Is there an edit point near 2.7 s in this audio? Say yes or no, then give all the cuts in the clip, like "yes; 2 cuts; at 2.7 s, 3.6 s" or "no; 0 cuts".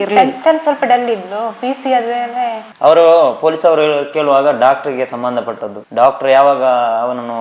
yes; 1 cut; at 2.7 s